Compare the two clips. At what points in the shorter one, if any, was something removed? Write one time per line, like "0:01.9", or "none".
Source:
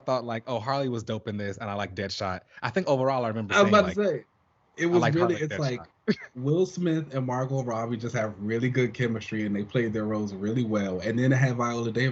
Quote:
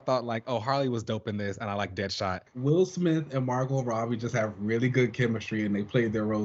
0:02.5